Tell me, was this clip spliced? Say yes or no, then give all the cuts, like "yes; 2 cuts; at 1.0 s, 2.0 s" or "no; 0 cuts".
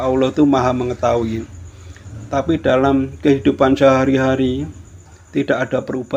no; 0 cuts